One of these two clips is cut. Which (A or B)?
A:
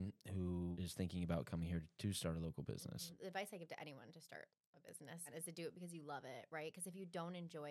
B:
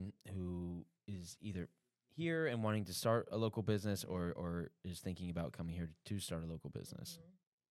A